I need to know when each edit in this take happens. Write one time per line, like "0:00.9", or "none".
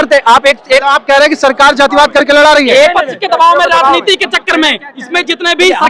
none